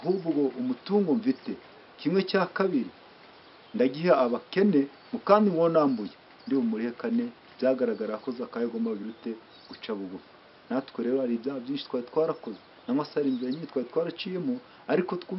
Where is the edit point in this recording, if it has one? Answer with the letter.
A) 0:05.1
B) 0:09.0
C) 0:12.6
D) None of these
D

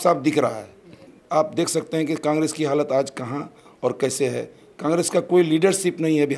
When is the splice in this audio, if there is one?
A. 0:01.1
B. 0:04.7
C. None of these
A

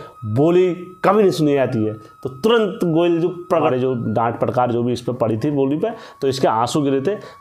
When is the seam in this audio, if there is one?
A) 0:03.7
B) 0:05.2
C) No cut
A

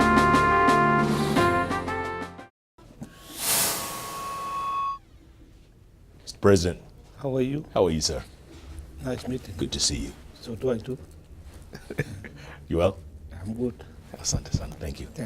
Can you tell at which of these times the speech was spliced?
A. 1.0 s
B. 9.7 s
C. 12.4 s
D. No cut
B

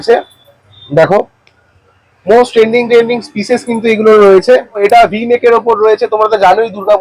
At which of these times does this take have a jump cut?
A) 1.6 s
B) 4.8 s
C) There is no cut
B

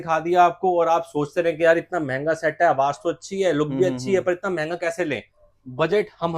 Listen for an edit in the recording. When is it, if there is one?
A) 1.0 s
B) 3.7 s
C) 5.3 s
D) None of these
C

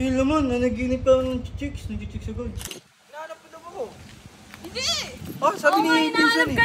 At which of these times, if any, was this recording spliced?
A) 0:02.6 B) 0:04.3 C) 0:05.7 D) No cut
A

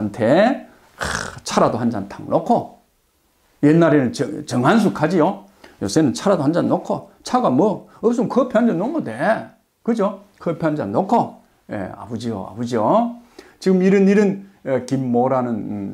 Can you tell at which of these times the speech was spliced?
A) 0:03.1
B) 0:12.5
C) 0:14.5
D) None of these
D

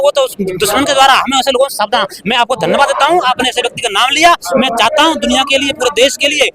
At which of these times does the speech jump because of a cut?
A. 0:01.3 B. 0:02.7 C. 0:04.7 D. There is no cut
D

